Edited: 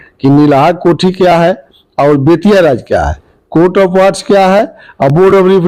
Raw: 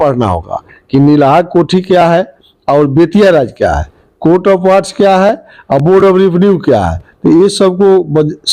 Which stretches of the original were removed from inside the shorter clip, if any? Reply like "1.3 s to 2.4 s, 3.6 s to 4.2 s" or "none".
none